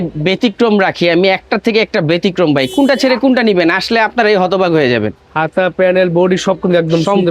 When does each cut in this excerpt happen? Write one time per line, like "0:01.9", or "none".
none